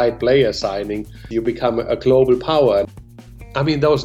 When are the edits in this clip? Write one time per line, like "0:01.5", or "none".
0:01.2
0:02.9